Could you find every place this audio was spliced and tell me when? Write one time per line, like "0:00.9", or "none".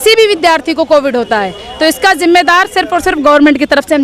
none